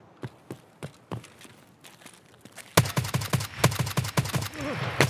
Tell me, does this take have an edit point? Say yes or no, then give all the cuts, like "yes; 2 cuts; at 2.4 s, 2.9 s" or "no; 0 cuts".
no; 0 cuts